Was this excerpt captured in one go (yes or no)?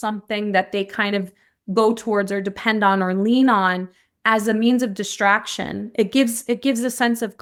yes